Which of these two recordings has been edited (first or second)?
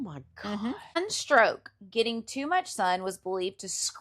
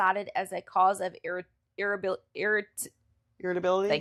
first